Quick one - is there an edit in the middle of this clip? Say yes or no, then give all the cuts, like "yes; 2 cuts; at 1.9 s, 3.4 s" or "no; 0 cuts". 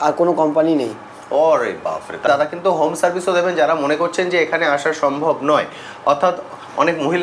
yes; 1 cut; at 2.3 s